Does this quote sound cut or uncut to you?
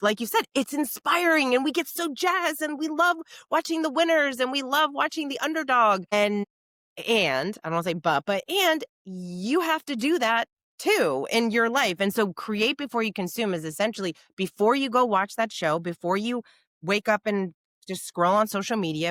uncut